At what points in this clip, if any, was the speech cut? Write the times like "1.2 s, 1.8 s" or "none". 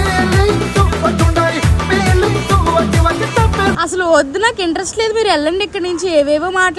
3.8 s